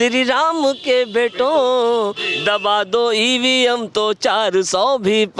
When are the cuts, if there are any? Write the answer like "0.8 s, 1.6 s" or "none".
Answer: none